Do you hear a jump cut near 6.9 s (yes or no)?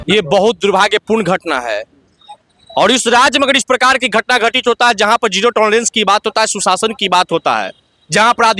no